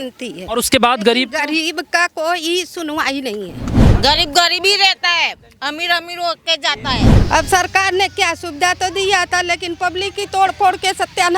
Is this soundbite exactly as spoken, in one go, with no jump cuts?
no; 2 cuts; at 3.9 s, 7.1 s

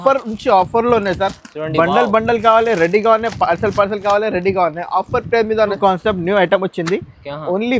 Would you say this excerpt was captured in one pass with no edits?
no; 1 cut; at 5.8 s

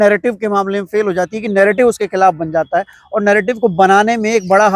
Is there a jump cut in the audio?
no; 0 cuts

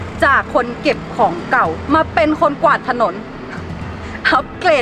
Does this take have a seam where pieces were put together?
no; 0 cuts

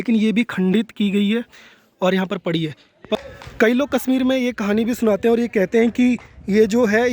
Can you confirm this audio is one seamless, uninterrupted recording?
yes; 0 cuts

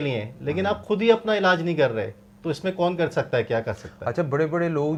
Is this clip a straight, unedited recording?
yes; 0 cuts

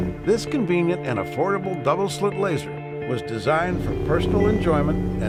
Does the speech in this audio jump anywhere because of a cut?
no; 0 cuts

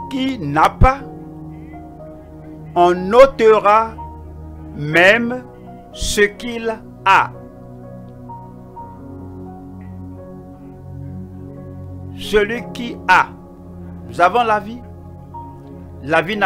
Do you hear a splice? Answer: no; 0 cuts

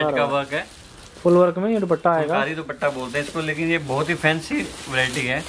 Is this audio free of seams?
yes; 0 cuts

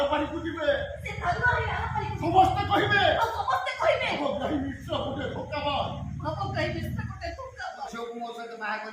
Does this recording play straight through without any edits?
no; 1 cut; at 7.8 s

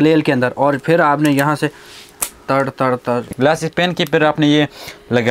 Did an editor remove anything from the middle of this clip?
yes; 1 cut; at 3.3 s

